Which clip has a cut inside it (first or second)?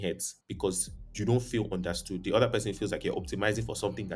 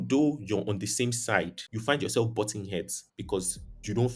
second